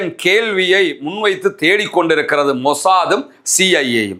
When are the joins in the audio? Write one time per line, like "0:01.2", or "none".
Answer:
none